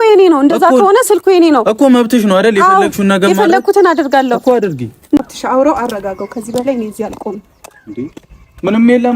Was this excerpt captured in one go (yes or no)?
no